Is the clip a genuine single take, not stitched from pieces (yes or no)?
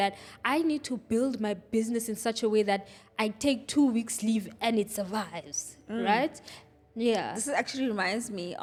yes